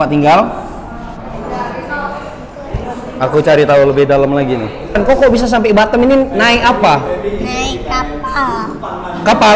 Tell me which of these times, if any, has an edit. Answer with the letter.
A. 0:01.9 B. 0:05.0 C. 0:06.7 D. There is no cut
B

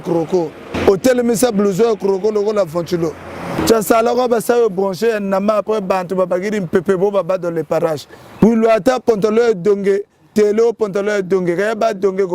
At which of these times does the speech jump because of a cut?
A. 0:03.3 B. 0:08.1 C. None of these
C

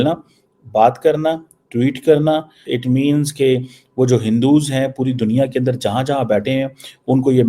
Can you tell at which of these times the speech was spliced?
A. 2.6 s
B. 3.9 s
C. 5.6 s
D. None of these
A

